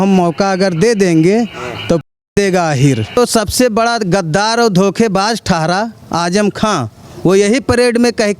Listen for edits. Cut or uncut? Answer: cut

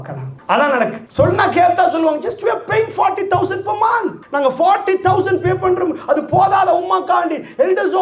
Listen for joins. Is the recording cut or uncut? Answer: uncut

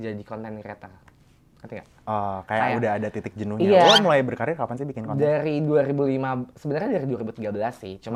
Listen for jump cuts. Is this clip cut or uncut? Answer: uncut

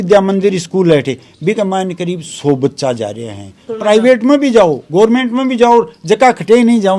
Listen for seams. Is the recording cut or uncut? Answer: cut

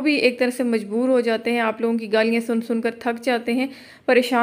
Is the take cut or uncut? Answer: uncut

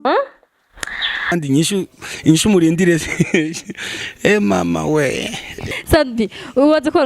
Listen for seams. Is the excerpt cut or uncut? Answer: cut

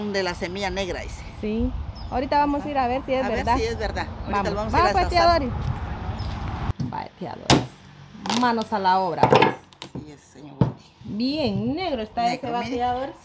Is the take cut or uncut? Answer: cut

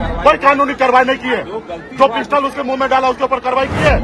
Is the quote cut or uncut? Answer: uncut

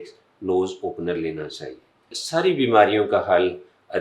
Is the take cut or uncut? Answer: cut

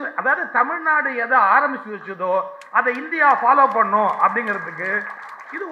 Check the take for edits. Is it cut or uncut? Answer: uncut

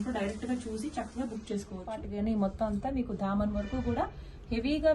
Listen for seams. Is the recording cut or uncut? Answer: cut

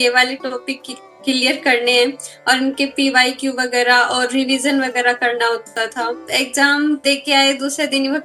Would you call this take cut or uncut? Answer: cut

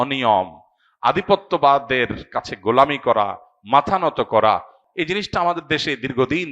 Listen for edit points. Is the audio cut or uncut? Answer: cut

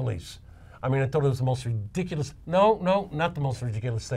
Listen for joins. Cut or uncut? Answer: cut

